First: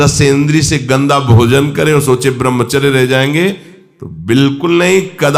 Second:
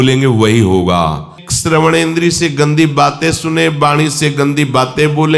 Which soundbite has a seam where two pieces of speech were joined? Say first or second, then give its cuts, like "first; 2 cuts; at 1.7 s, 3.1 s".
second; 1 cut; at 1.4 s